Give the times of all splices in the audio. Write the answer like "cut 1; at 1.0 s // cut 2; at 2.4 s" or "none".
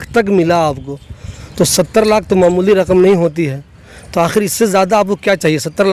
none